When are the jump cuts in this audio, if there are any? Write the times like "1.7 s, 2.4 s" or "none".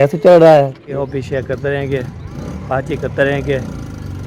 0.9 s